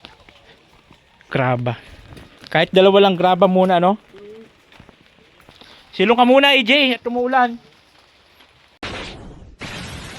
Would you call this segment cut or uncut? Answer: cut